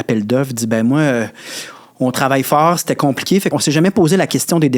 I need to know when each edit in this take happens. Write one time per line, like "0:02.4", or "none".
0:03.5